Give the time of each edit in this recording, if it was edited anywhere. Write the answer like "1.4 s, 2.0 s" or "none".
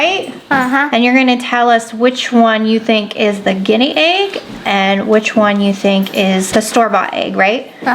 6.5 s